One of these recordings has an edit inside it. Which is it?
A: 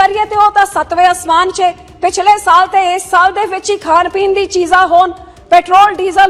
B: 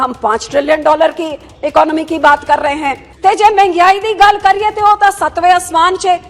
B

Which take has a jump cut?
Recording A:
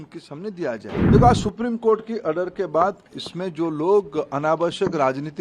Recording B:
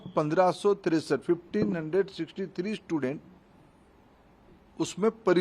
A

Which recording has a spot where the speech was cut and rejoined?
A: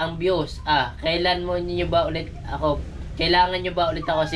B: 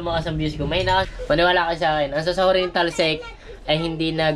B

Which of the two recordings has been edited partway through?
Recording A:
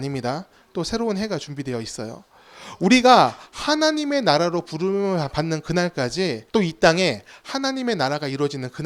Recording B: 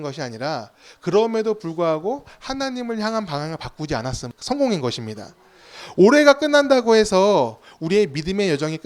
B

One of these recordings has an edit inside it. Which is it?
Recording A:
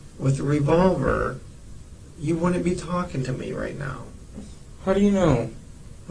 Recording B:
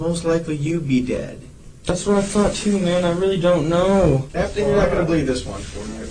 B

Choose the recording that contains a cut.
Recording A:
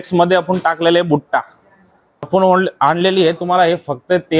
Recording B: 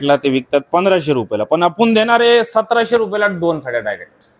A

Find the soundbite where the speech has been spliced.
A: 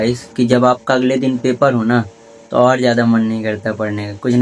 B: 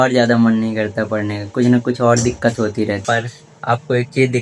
B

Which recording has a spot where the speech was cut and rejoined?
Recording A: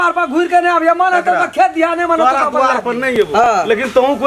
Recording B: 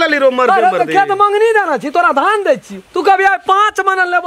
A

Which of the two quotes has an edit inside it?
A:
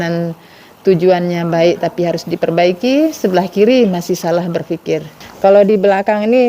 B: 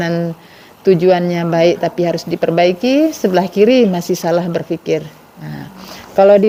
A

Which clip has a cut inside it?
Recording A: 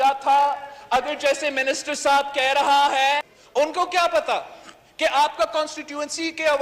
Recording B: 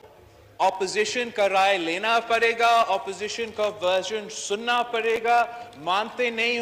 A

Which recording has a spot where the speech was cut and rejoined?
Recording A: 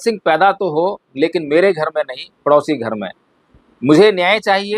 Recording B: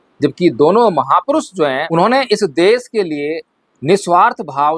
B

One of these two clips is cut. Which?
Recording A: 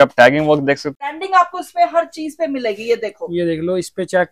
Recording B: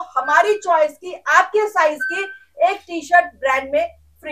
A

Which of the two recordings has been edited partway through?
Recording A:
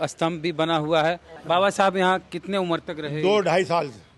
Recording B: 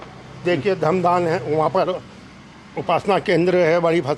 A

